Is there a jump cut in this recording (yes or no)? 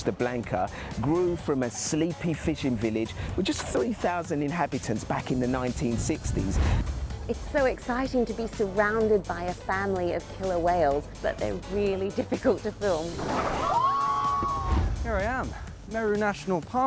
yes